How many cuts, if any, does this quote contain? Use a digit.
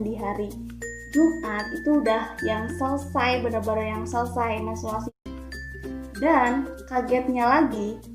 1